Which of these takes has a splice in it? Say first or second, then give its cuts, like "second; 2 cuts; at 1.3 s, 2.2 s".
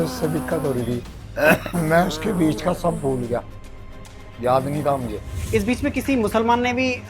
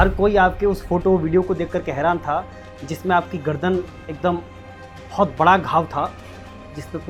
first; 2 cuts; at 1.2 s, 5.3 s